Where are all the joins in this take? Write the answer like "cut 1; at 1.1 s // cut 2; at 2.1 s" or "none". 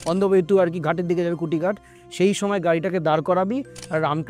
cut 1; at 1.9 s